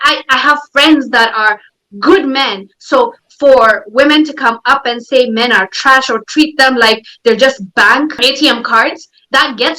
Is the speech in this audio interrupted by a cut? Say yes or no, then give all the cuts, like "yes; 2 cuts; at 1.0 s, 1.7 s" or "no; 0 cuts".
yes; 1 cut; at 8.2 s